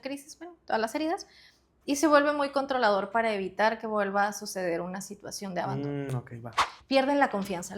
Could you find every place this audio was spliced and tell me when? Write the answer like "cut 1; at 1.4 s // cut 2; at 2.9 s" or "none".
cut 1; at 6.6 s